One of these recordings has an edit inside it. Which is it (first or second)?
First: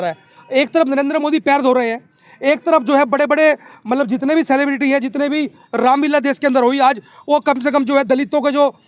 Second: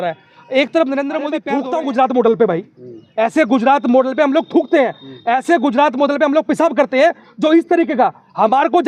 second